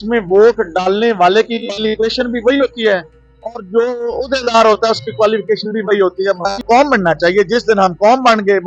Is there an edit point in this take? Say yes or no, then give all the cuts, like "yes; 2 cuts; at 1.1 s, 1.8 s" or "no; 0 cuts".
yes; 1 cut; at 6.6 s